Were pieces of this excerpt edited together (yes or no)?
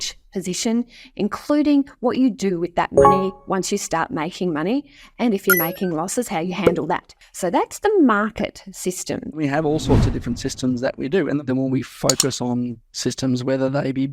yes